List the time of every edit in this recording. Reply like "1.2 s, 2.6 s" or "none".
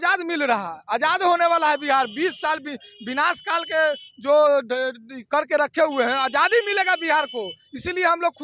none